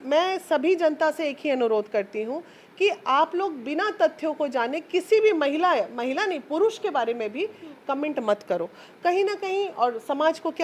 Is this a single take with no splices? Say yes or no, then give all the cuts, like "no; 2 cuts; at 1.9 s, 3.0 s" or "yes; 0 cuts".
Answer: yes; 0 cuts